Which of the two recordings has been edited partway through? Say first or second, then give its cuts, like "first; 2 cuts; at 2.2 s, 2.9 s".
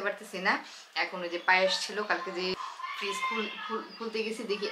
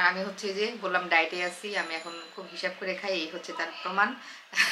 first; 1 cut; at 2.5 s